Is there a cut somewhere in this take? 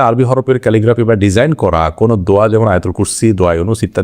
no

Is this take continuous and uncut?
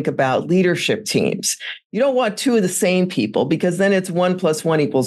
yes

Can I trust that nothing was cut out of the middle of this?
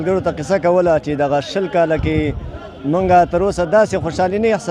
yes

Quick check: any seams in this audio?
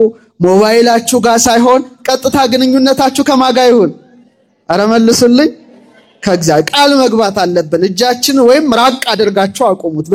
no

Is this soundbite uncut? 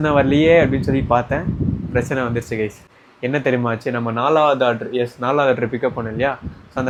yes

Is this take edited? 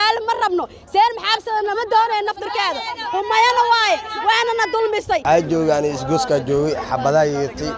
yes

